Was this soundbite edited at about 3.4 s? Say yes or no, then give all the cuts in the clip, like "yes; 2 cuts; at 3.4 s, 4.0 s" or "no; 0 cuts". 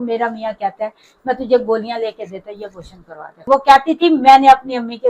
yes; 1 cut; at 3.4 s